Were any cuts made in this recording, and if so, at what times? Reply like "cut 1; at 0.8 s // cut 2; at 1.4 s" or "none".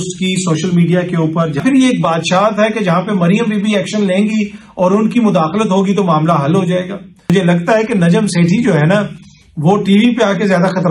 cut 1; at 1.6 s // cut 2; at 7.3 s

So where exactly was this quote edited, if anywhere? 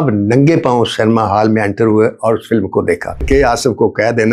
cut 1; at 3.2 s

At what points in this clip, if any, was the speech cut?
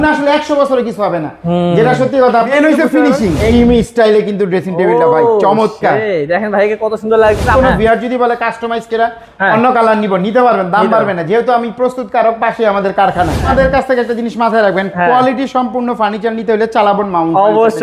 cut 1; at 2.5 s // cut 2; at 3.5 s // cut 3; at 7.5 s // cut 4; at 13.5 s

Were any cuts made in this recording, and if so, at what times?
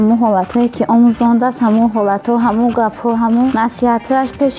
cut 1; at 3.5 s

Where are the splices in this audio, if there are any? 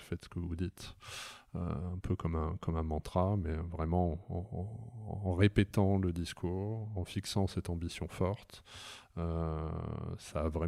none

